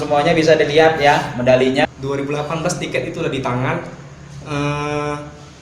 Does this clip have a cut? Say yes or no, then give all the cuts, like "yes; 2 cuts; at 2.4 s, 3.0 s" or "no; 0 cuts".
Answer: yes; 1 cut; at 1.9 s